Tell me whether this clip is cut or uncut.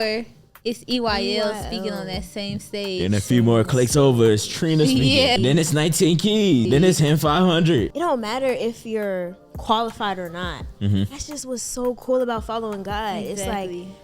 cut